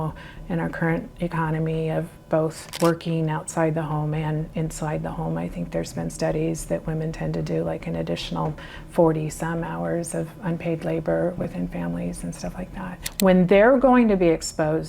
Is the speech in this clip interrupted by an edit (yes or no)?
yes